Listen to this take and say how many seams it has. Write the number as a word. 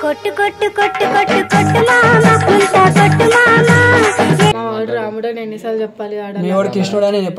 one